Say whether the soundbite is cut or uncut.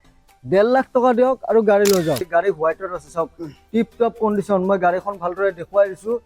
cut